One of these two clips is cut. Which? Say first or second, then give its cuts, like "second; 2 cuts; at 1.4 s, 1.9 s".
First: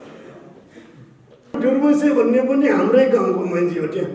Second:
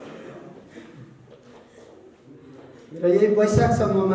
first; 1 cut; at 1.6 s